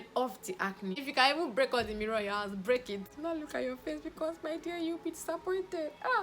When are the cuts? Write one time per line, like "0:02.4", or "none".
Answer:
0:01.0
0:03.1